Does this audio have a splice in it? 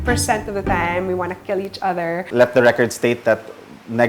yes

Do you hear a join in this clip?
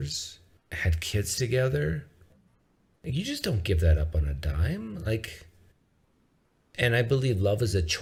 no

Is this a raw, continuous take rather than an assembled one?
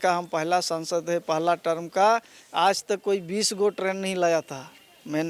yes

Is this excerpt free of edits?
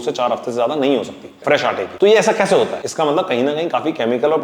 no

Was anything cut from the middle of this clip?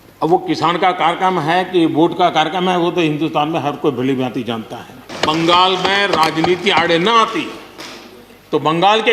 yes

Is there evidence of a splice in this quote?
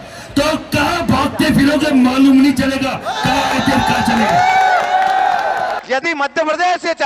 yes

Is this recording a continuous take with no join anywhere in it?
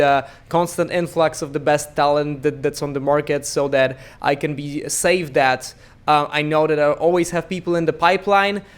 yes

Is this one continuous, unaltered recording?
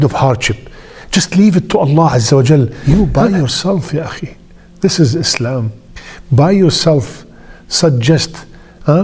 no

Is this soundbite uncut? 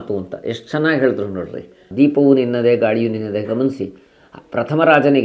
no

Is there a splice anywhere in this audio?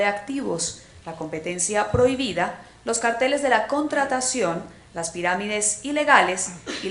no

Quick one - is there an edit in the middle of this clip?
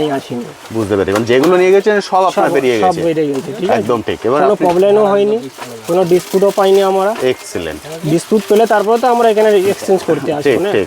no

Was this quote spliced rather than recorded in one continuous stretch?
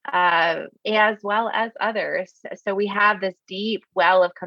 no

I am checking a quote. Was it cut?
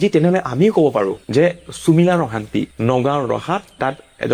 no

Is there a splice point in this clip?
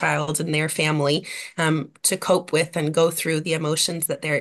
no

